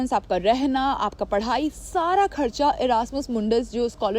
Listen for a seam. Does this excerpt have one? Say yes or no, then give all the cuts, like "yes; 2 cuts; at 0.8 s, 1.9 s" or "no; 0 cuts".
no; 0 cuts